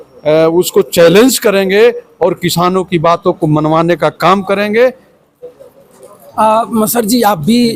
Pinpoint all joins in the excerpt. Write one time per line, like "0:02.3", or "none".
none